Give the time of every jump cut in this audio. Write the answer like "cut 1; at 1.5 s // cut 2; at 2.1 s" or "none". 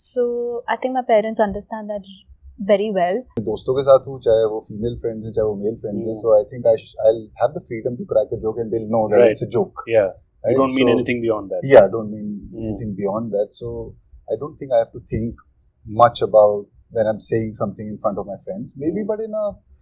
cut 1; at 3.4 s